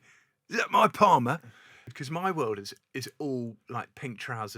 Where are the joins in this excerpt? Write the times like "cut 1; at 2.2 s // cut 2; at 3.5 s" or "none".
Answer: cut 1; at 2.0 s